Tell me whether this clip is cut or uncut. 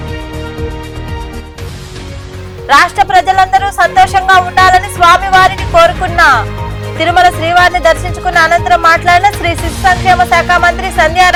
uncut